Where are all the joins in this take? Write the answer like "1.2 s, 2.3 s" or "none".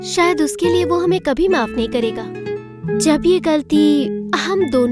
2.3 s